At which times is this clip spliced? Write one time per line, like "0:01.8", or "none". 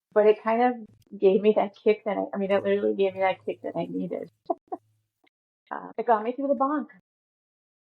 0:05.9